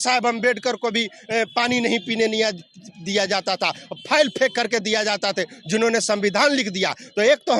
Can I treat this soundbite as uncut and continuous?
yes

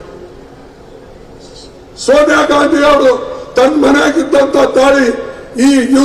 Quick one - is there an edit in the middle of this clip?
no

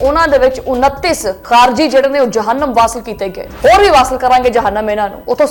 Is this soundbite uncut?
yes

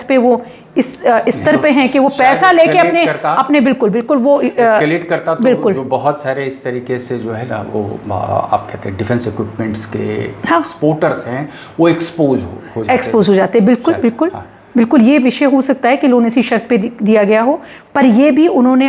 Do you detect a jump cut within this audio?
no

